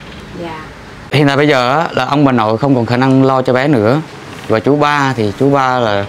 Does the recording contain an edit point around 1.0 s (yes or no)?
yes